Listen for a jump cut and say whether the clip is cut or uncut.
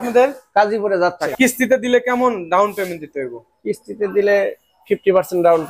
cut